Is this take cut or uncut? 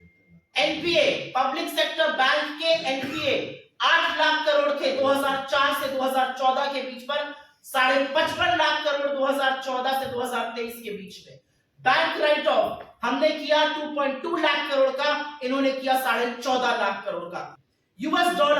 cut